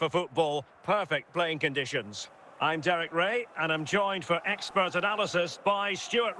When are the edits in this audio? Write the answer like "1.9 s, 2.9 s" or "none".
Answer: 2.4 s